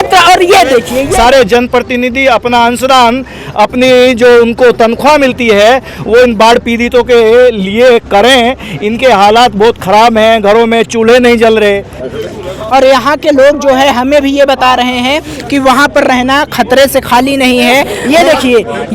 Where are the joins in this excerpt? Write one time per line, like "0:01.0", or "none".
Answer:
0:01.1
0:18.0